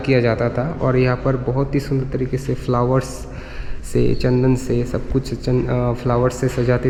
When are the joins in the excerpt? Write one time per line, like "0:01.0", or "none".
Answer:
none